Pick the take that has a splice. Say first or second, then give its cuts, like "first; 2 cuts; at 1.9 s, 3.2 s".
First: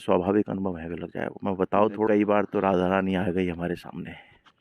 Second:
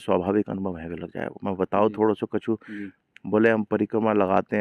first; 1 cut; at 2.1 s